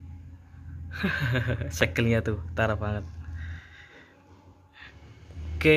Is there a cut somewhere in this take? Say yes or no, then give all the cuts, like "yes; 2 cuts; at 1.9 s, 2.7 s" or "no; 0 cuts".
yes; 1 cut; at 4.7 s